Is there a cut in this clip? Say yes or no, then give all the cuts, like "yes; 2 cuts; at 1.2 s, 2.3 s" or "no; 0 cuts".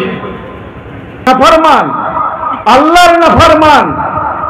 yes; 1 cut; at 1.3 s